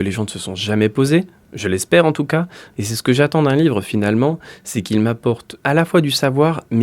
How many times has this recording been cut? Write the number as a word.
one